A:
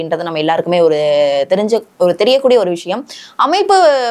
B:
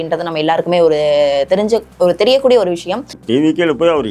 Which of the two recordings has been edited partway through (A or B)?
B